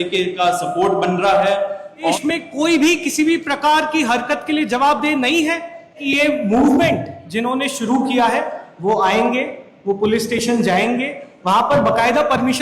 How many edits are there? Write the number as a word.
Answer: two